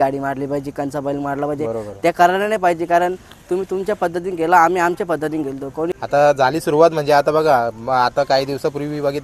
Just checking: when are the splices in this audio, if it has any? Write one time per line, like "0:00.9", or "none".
0:05.9